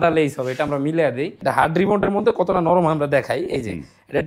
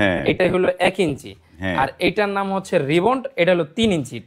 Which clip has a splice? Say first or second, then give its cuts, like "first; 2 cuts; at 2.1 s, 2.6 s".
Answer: first; 1 cut; at 1.4 s